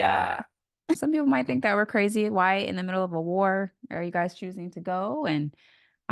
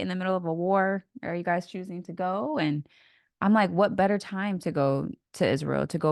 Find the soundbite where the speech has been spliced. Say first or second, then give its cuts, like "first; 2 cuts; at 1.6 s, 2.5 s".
first; 1 cut; at 1.0 s